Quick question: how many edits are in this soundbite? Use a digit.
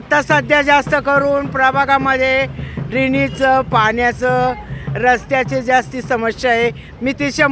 0